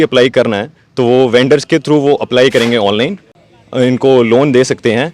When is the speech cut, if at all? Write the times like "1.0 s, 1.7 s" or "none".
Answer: 3.3 s